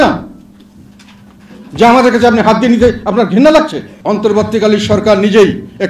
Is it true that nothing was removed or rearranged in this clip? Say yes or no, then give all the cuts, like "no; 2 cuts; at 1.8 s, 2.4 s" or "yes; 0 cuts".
no; 1 cut; at 3.9 s